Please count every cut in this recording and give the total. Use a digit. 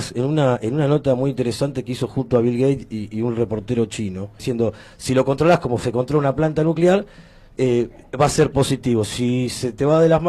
1